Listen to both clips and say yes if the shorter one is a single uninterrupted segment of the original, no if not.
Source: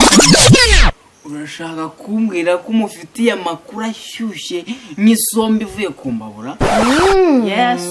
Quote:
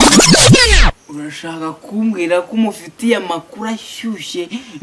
no